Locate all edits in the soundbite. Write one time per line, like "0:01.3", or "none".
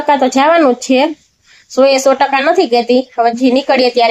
none